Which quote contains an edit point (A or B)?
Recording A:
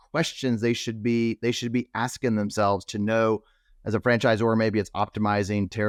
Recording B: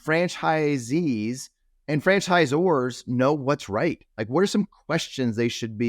B